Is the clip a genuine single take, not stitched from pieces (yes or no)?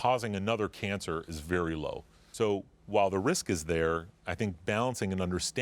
no